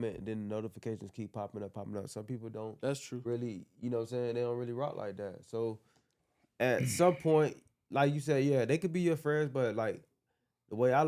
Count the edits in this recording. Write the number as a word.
zero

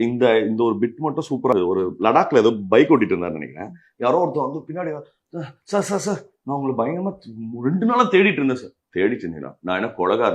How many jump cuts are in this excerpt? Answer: one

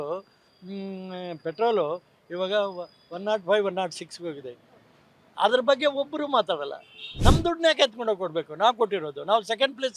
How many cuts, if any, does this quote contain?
one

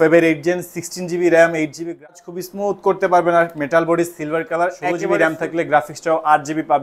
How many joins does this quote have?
two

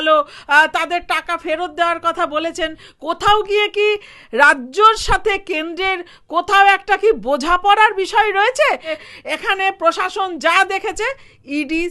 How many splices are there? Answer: two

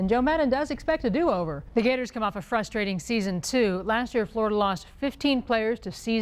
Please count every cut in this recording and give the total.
one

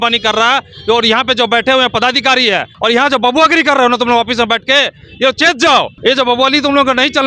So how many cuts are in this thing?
two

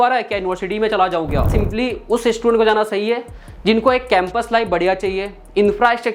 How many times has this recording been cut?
one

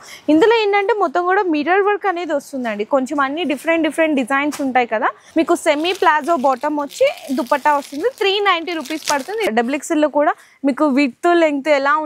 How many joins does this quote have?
two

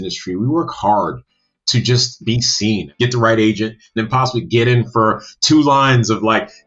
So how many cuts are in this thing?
two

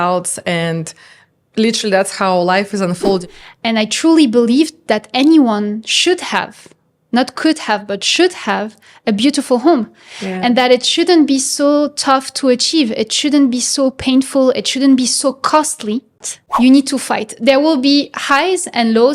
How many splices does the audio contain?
two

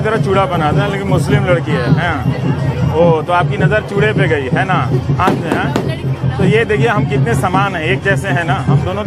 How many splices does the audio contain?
zero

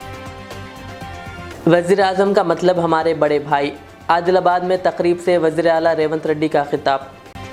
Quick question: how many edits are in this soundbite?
zero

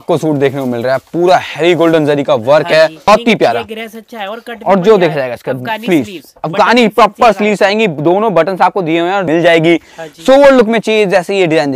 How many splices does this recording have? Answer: two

